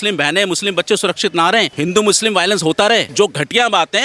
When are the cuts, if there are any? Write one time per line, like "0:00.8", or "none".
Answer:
0:01.7
0:03.1